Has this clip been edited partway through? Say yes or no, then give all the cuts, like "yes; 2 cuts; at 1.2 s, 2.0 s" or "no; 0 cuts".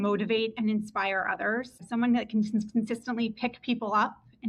yes; 1 cut; at 1.8 s